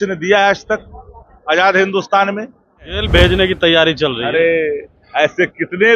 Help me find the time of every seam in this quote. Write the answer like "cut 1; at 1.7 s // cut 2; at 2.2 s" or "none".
cut 1; at 3.0 s